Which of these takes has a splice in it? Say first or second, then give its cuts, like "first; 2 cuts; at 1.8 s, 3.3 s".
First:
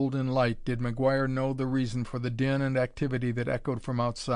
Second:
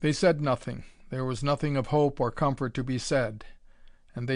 first; 1 cut; at 2.1 s